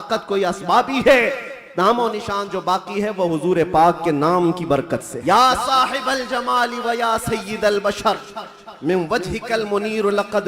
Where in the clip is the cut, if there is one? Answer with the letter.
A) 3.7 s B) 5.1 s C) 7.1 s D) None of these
B